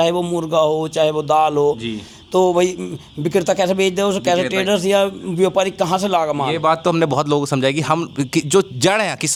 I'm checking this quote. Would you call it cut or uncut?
uncut